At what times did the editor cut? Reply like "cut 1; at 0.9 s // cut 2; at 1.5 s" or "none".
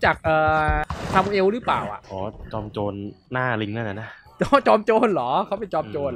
cut 1; at 0.9 s // cut 2; at 2.0 s